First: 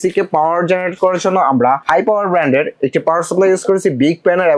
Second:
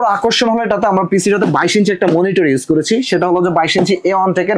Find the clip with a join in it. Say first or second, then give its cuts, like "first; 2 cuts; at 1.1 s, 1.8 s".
first; 1 cut; at 1.8 s